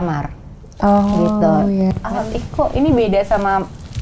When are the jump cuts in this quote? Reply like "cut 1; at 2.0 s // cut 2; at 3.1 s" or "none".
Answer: cut 1; at 1.9 s